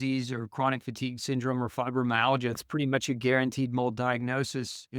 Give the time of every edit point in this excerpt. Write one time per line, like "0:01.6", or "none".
0:02.6

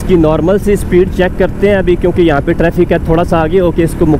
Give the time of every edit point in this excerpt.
none

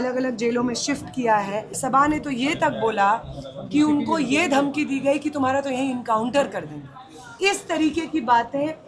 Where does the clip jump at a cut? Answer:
0:01.7

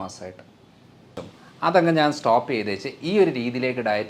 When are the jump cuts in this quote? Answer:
0:01.2

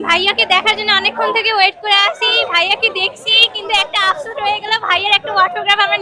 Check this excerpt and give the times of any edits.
none

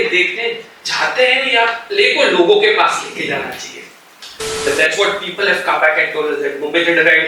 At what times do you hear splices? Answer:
0:04.7

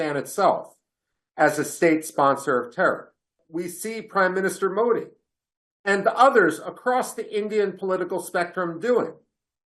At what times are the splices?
0:03.4

